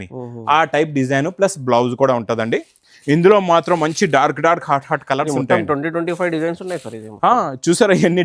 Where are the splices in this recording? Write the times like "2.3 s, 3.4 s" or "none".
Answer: none